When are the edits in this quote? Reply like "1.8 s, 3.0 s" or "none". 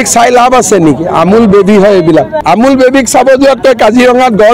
2.3 s